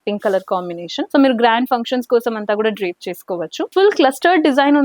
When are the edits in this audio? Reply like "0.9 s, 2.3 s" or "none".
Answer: 1.1 s, 3.7 s